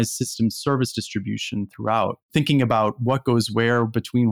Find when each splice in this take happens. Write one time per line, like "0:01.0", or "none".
0:02.3